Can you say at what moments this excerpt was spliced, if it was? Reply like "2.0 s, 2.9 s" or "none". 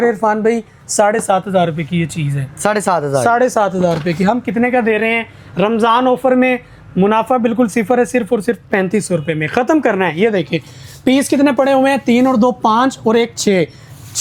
none